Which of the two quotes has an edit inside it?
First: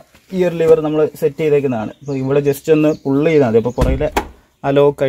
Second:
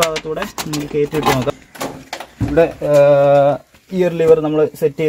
second; 1 cut; at 1.5 s

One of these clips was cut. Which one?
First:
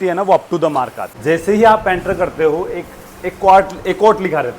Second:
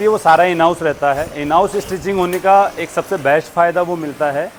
first; 1 cut; at 1.0 s

